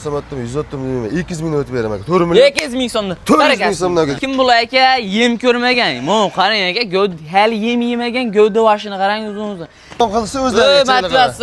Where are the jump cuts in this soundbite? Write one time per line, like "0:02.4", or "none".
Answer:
0:04.2
0:10.0